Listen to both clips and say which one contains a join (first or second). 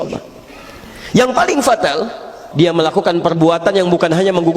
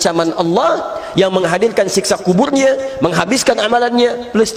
first